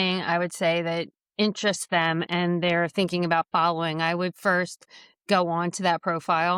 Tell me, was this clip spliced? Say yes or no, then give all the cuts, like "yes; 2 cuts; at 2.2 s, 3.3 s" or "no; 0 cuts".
no; 0 cuts